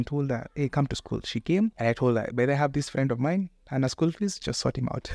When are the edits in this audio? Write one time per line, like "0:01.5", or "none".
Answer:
0:01.8